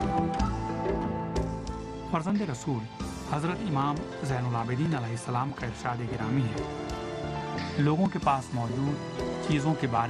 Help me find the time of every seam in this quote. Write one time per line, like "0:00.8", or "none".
0:02.5